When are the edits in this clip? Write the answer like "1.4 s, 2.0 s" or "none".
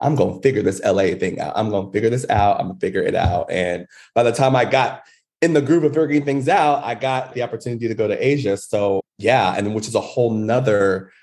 none

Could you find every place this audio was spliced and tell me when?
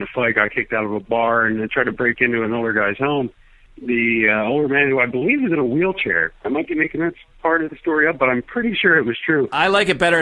none

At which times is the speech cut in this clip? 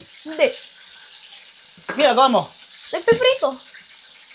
none

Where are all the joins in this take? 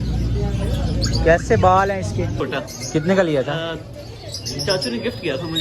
2.4 s

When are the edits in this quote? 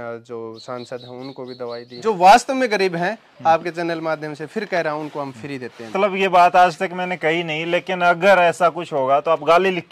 1.9 s, 5.9 s

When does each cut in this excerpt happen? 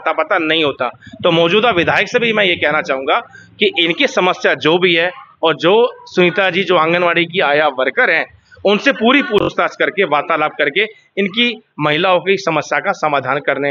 9.5 s

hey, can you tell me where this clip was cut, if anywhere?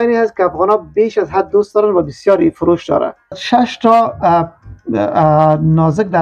3.4 s

